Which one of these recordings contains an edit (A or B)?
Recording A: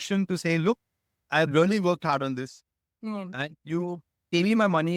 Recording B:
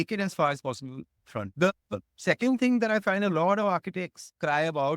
B